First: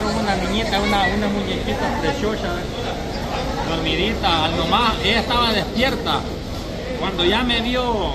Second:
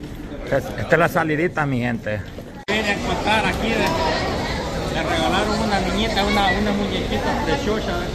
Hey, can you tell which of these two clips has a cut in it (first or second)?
second